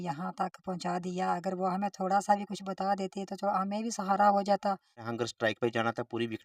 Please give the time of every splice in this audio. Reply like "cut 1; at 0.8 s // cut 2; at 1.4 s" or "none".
cut 1; at 5.0 s

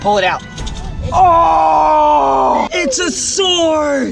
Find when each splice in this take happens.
cut 1; at 2.7 s

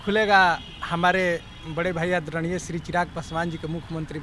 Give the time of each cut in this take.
none

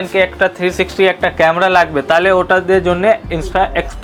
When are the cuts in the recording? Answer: none

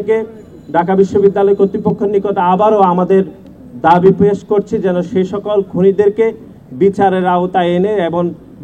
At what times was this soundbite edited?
none

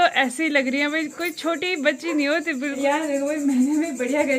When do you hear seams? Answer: cut 1; at 2.8 s

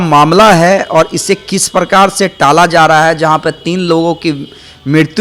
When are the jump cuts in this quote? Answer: none

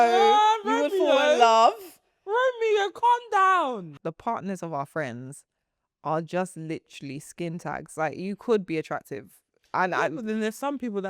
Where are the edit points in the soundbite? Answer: cut 1; at 3.9 s

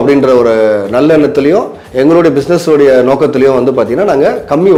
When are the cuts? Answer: none

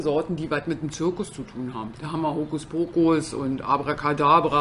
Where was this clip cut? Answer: cut 1; at 2.0 s // cut 2; at 3.3 s

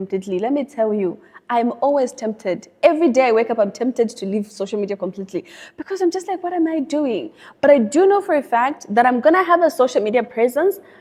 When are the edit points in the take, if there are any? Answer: none

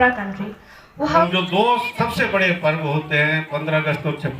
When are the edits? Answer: cut 1; at 1.2 s

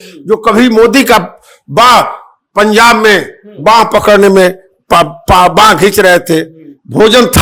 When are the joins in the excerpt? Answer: none

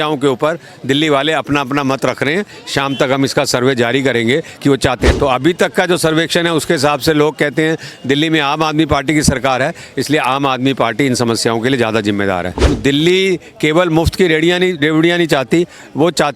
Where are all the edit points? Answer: cut 1; at 5.1 s // cut 2; at 12.7 s

